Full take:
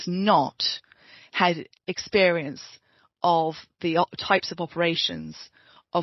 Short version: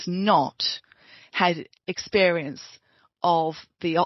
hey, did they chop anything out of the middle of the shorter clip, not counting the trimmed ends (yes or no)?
no